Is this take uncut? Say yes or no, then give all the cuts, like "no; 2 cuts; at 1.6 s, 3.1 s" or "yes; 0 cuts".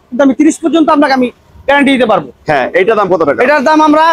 yes; 0 cuts